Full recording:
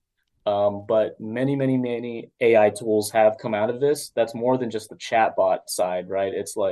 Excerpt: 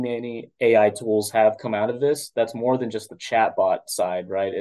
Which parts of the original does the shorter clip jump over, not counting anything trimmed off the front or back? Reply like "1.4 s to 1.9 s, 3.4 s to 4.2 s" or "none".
none